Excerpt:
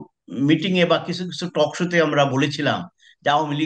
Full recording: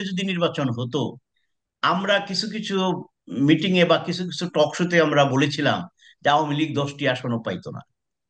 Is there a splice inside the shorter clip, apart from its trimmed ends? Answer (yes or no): no